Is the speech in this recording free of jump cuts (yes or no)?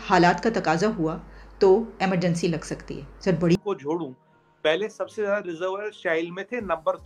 no